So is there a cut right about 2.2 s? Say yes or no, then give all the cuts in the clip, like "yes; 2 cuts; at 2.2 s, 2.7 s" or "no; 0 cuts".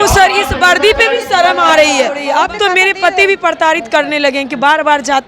yes; 1 cut; at 2.2 s